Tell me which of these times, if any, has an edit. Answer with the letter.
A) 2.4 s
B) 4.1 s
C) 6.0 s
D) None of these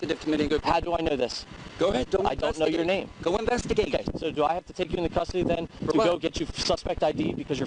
B